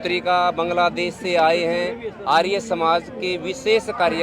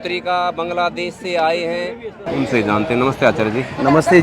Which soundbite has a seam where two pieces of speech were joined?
second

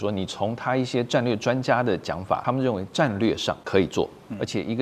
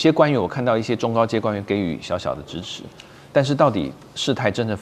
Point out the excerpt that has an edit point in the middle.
first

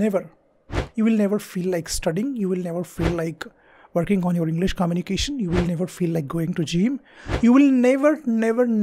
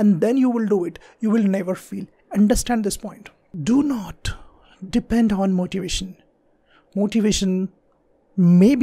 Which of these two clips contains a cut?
second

